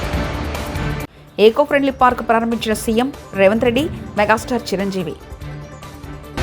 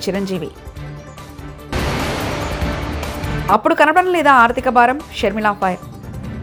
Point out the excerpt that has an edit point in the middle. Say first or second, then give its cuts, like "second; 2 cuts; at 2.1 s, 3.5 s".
first; 1 cut; at 0.9 s